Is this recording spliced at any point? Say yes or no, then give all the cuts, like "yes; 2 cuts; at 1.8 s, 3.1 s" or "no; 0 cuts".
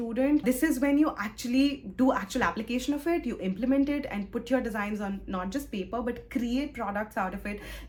no; 0 cuts